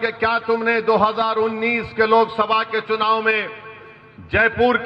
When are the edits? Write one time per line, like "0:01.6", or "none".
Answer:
none

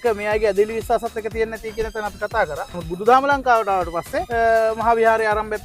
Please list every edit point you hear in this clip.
0:02.7
0:04.3

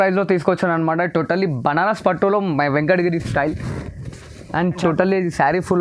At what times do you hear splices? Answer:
0:04.8

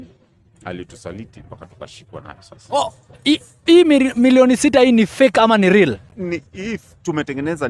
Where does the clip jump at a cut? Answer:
0:02.6

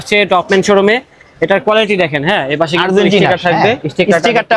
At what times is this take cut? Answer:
none

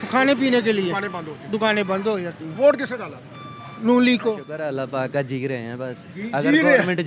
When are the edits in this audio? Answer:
0:04.5

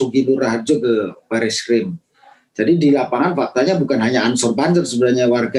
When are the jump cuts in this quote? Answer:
none

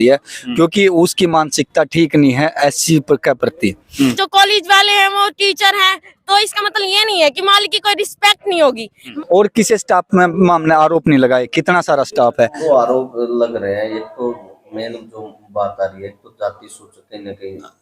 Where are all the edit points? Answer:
0:03.9
0:09.1
0:12.6

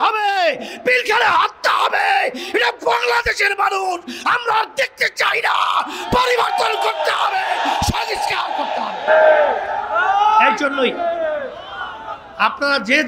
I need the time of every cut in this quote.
none

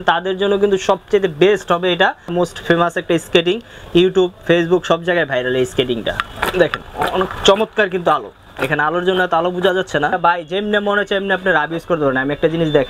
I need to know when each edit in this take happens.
0:02.3
0:06.2
0:10.2

